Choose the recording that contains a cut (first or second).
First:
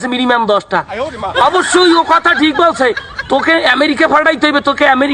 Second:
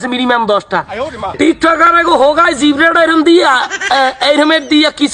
second